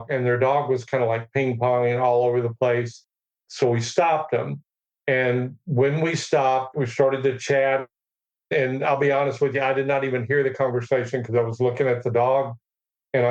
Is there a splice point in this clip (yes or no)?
yes